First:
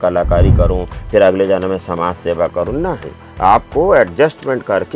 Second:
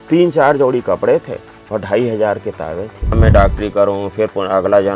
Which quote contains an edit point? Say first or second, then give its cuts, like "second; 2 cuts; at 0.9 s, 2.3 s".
second; 1 cut; at 3.1 s